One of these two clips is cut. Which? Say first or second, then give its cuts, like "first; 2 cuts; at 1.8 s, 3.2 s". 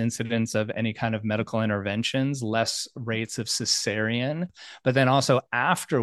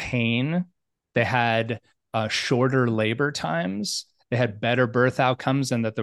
first; 1 cut; at 4.6 s